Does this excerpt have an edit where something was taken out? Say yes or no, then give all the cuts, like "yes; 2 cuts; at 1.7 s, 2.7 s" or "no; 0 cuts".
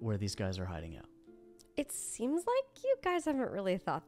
no; 0 cuts